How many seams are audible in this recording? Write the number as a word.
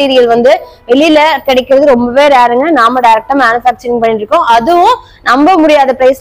zero